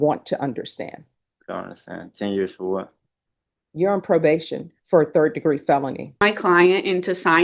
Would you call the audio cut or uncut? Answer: cut